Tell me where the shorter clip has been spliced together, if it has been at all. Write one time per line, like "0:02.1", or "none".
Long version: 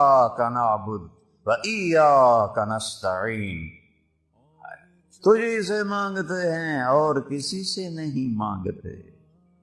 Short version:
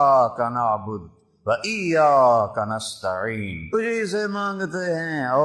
0:03.8